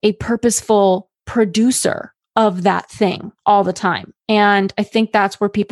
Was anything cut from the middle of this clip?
yes; 1 cut; at 3.3 s

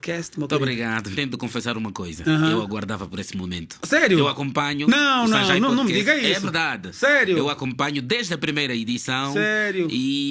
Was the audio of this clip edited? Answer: yes; 1 cut; at 1.1 s

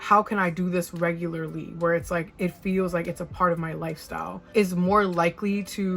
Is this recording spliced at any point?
no; 0 cuts

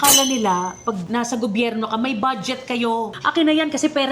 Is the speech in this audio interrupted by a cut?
yes; 2 cuts; at 1.0 s, 3.2 s

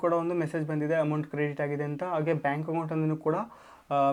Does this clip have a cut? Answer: no; 0 cuts

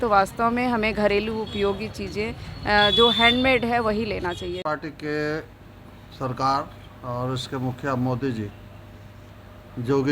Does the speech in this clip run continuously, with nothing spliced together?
no; 1 cut; at 4.8 s

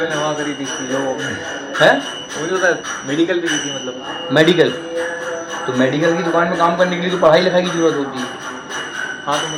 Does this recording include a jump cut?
no; 0 cuts

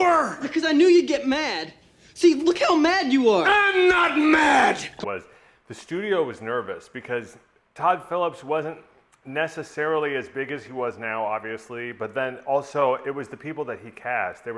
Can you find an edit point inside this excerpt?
yes; 1 cut; at 5.0 s

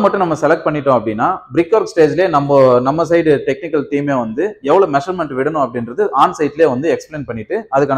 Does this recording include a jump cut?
no; 0 cuts

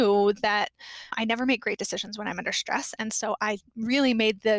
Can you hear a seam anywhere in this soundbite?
yes; 1 cut; at 1.1 s

